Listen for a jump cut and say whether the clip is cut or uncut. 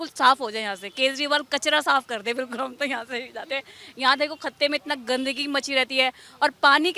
uncut